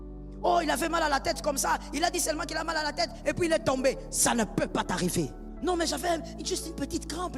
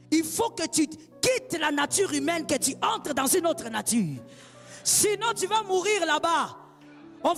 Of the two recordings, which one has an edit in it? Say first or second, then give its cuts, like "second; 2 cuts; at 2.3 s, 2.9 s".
first; 1 cut; at 5.4 s